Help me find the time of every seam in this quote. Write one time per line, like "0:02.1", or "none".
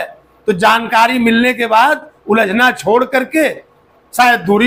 none